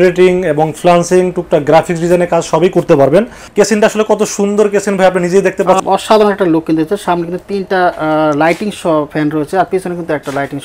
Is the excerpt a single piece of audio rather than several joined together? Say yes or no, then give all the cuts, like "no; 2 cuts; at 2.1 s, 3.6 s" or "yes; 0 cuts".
no; 2 cuts; at 3.4 s, 5.8 s